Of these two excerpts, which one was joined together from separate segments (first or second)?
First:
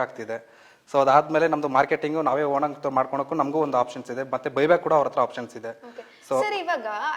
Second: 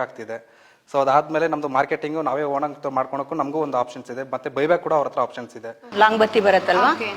second